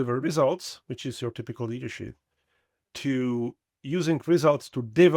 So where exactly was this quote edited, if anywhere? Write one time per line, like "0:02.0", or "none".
0:02.9